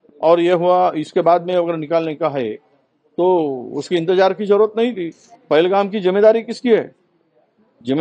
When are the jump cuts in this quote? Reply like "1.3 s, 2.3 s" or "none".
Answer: 5.3 s